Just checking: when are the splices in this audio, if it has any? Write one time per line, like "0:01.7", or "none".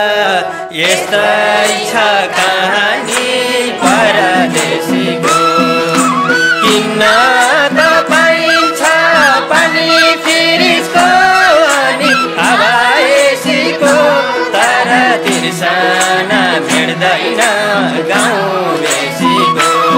none